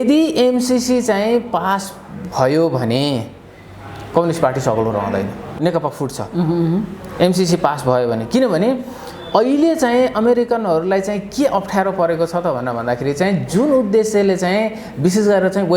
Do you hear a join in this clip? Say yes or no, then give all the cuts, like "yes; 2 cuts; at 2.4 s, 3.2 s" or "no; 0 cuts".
yes; 1 cut; at 5.5 s